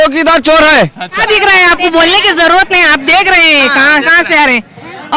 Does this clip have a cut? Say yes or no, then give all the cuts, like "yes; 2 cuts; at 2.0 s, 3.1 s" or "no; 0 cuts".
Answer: yes; 1 cut; at 1.2 s